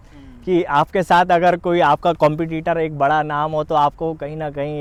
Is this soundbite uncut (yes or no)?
yes